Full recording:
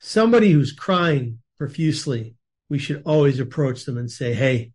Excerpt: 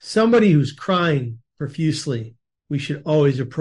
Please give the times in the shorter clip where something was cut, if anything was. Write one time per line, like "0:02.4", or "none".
none